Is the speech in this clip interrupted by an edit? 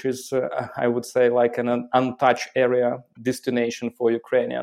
yes; 1 cut; at 3.1 s

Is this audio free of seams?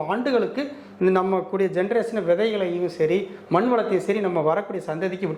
yes; 0 cuts

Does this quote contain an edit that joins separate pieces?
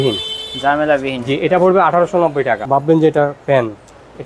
yes; 1 cut; at 2.6 s

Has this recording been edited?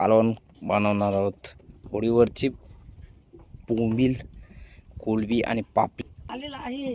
yes; 1 cut; at 5.9 s

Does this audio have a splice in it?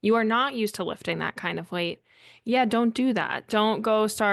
no; 0 cuts

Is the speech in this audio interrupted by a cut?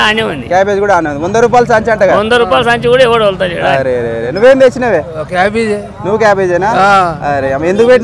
no; 0 cuts

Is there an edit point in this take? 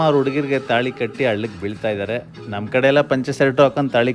no; 0 cuts

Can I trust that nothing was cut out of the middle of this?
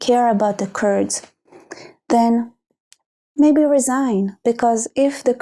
yes; 0 cuts

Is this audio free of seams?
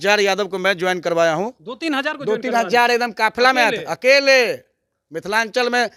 yes; 0 cuts

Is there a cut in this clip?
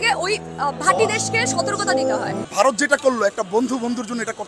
yes; 1 cut; at 2.4 s

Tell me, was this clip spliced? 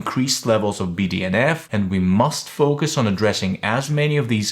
yes; 1 cut; at 1.7 s

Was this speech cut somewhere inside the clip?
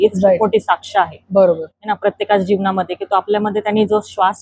no; 0 cuts

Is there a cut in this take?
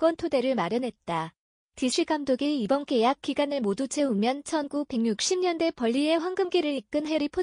yes; 1 cut; at 1.0 s

